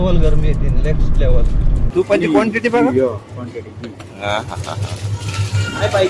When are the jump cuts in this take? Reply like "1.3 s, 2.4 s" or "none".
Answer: 1.8 s

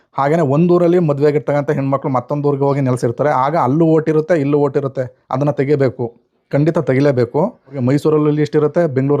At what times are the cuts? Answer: 7.8 s

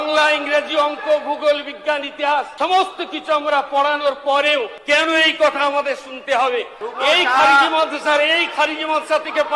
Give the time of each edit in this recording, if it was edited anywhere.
2.5 s, 4.8 s, 6.8 s

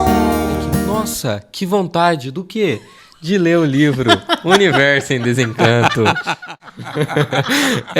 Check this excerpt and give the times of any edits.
0.9 s, 6.4 s

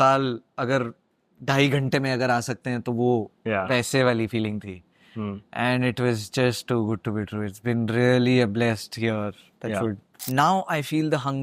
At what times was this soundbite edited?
10.1 s

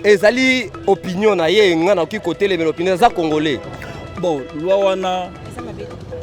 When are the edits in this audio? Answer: 3.7 s

